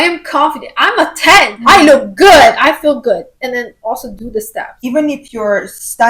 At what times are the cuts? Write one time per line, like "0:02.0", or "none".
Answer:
0:01.5
0:04.8